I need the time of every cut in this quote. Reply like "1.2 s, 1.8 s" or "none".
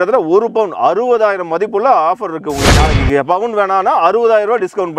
2.7 s